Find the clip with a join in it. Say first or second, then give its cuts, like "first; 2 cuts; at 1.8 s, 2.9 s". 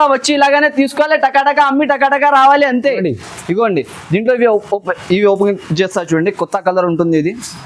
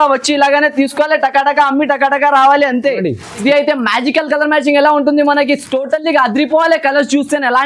second; 1 cut; at 3.4 s